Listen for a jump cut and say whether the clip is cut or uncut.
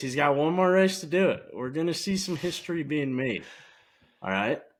uncut